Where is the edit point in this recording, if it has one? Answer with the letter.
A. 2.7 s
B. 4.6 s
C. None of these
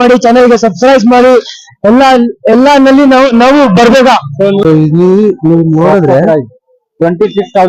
B